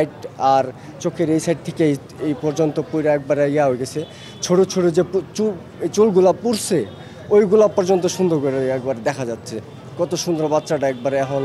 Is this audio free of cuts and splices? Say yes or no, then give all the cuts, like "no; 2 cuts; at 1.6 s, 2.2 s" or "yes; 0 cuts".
yes; 0 cuts